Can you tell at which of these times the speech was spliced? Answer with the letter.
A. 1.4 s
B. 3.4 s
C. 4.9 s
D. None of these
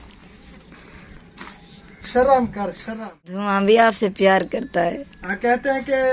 B